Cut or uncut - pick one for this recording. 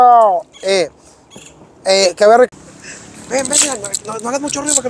cut